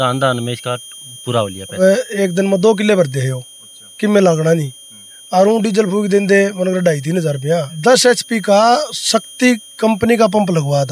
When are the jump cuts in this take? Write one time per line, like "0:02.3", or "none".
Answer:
0:01.8
0:07.8